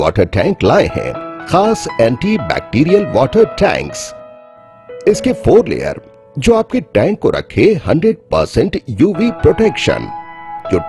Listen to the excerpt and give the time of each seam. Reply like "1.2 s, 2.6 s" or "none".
none

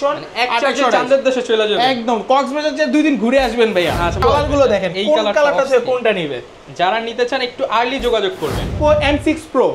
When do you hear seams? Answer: 4.2 s, 8.8 s

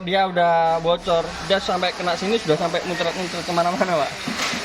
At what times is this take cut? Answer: none

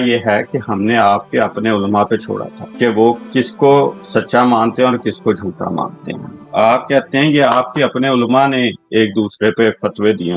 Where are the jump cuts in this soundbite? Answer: 2.6 s, 3.2 s, 4.0 s

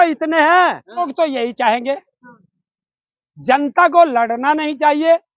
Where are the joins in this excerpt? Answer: 1.1 s

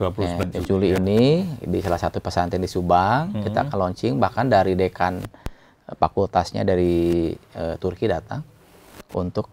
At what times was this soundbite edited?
none

